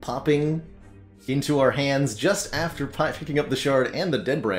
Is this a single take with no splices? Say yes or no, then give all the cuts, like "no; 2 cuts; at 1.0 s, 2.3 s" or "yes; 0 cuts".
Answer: yes; 0 cuts